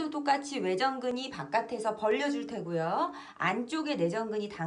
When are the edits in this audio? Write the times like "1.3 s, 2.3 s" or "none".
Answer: none

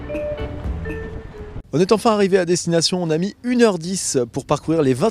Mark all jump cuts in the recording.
1.2 s

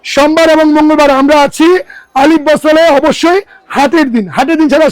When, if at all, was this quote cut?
none

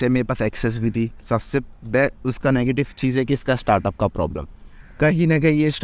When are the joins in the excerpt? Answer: none

